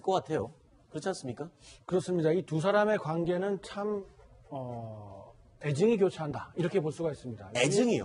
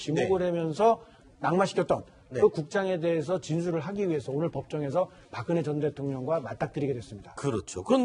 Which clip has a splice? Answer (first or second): second